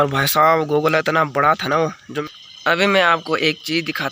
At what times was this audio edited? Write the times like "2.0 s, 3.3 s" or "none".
2.2 s